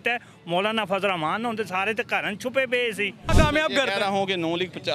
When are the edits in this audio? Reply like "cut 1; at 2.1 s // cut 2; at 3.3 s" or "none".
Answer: cut 1; at 3.3 s